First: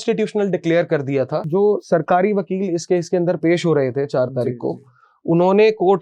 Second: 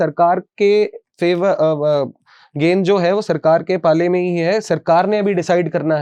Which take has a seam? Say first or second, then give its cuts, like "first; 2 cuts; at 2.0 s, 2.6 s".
first; 1 cut; at 1.5 s